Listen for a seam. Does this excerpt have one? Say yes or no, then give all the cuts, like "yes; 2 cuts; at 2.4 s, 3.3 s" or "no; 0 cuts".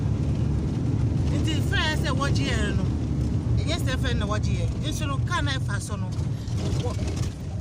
no; 0 cuts